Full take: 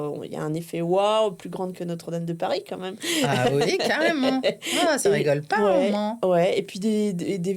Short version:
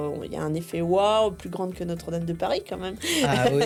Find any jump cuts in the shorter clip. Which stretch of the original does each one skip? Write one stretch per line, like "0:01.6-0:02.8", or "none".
none